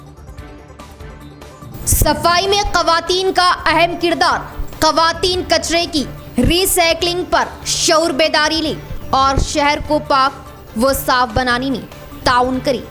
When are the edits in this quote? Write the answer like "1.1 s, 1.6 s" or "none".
1.3 s